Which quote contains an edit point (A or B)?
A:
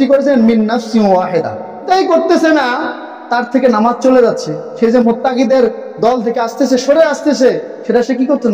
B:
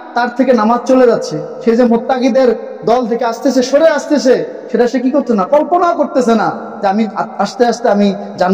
A